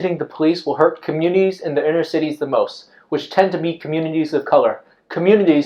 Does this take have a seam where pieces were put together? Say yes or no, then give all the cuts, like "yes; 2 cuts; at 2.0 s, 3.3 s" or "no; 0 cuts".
no; 0 cuts